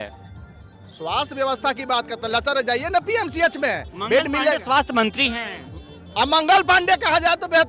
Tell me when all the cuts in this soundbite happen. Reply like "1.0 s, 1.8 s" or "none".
none